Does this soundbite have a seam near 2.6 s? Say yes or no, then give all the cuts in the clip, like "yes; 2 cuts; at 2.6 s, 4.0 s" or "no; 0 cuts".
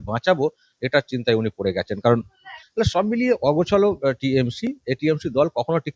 yes; 1 cut; at 2.6 s